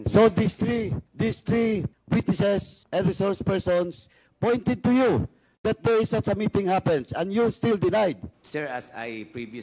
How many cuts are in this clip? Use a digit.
4